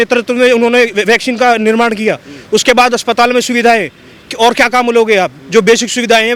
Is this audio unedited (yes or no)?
yes